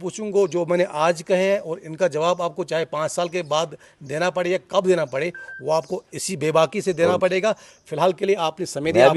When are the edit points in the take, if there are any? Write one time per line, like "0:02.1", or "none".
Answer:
none